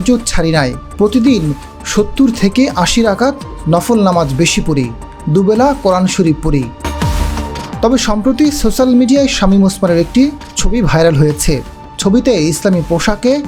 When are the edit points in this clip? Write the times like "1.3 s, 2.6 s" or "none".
6.8 s